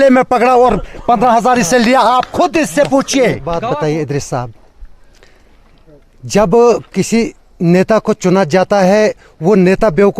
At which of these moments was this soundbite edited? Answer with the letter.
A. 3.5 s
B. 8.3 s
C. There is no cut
A